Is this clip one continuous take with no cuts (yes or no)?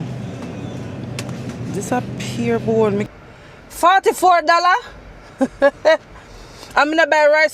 no